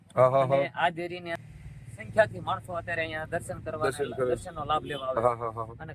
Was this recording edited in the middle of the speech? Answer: yes; 1 cut; at 1.3 s

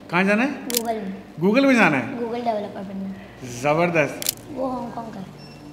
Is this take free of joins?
no; 1 cut; at 4.3 s

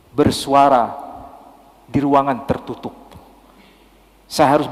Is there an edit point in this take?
no; 0 cuts

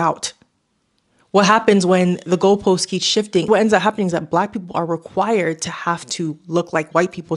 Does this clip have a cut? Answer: yes; 1 cut; at 3.4 s

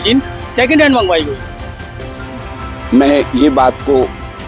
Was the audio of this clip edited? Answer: no; 0 cuts

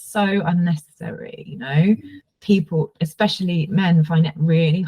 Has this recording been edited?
yes; 1 cut; at 2.2 s

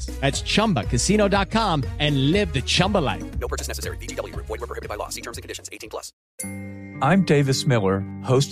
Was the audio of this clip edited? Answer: yes; 1 cut; at 6.2 s

